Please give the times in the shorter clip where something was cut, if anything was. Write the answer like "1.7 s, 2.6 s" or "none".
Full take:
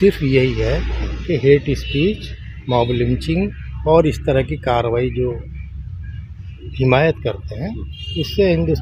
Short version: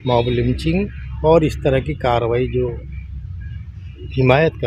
none